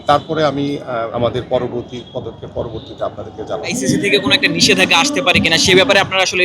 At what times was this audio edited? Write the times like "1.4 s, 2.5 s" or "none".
1.1 s, 3.7 s